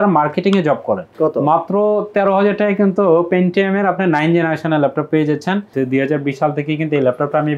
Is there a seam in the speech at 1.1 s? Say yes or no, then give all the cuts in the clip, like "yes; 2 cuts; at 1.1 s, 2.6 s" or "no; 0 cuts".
yes; 2 cuts; at 1.1 s, 5.7 s